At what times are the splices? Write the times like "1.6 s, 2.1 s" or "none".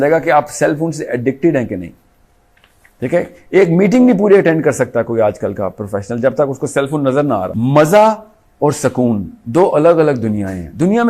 7.5 s